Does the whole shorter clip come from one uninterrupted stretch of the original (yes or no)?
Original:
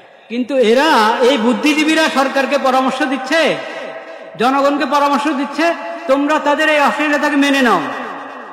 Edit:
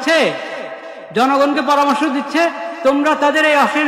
yes